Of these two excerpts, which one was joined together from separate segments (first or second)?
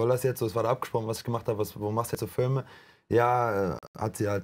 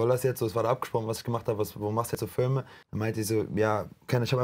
second